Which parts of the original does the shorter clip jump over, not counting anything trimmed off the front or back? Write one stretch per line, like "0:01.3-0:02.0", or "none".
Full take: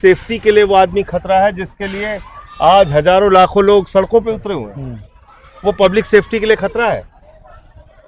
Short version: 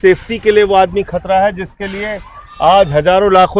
none